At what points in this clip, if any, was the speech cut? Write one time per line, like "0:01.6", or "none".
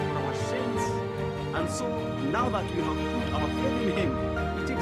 none